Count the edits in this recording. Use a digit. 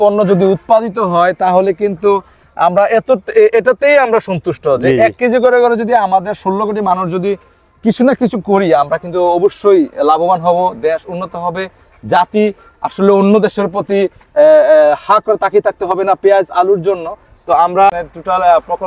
1